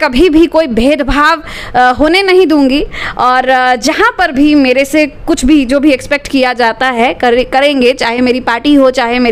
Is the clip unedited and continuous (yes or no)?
yes